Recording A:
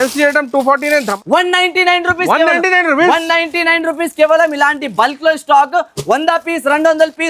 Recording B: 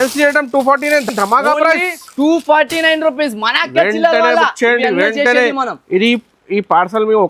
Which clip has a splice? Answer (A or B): A